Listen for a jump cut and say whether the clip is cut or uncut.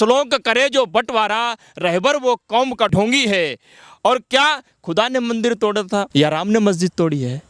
cut